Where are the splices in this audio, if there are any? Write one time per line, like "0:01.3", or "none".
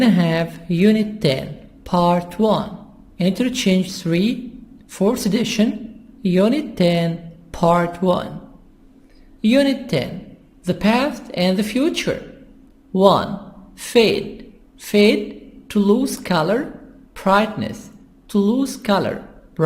none